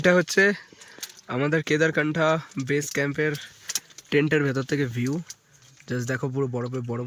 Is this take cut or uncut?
uncut